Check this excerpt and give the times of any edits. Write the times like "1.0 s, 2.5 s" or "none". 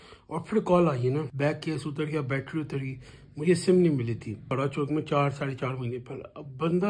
1.3 s, 4.5 s